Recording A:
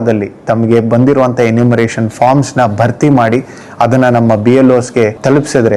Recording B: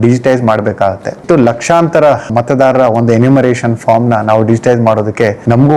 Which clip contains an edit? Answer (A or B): B